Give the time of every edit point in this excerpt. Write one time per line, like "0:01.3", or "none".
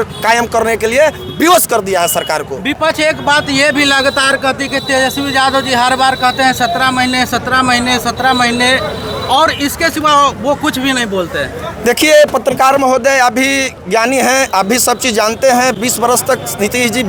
none